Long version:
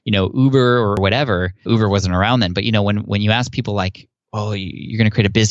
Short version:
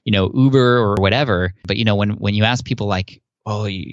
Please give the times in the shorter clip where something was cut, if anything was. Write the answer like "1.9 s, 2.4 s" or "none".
1.6 s